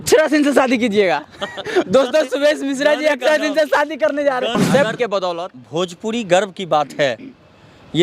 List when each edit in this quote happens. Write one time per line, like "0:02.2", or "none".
0:04.6